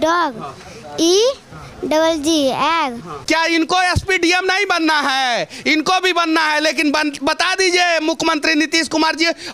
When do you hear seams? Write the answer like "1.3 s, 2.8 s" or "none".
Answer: 3.1 s